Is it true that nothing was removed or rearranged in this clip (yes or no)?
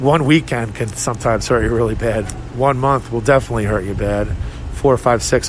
yes